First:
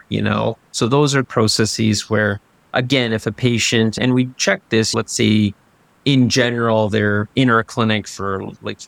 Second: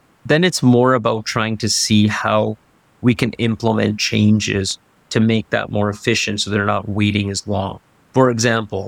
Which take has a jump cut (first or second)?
first